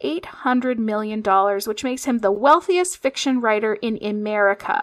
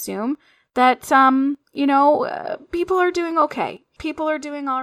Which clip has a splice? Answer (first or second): second